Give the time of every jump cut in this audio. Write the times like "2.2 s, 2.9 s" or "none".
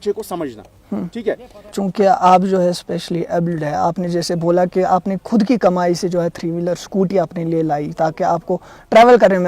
1.8 s